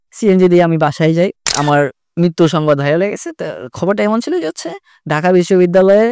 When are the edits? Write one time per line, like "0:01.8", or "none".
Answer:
0:01.5